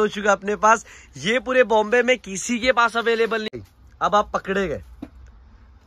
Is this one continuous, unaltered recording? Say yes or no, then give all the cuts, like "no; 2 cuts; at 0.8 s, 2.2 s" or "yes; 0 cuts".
no; 1 cut; at 3.5 s